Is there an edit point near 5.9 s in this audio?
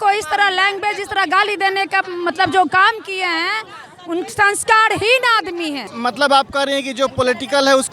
yes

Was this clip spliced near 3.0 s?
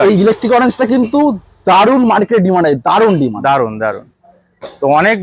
no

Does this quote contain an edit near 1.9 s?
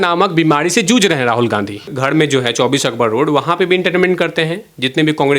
yes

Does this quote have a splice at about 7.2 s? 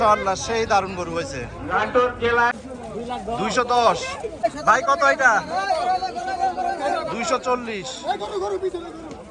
no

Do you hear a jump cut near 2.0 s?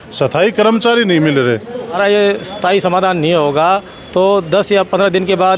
yes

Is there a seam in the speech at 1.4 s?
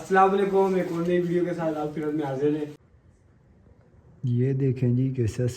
no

